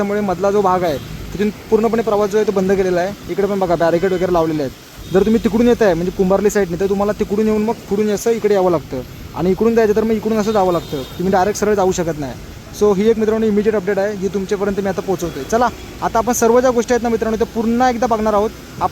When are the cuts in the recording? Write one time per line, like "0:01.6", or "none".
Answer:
none